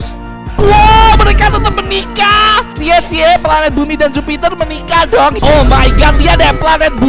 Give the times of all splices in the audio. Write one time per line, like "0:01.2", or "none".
0:05.4